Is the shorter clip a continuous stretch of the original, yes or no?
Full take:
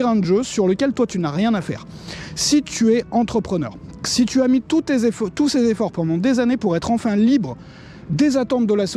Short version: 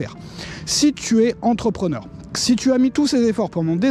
no